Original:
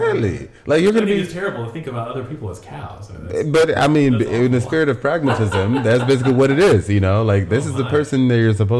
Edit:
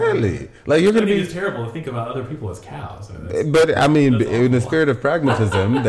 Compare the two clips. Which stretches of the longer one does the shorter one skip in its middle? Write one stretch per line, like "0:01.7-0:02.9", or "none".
none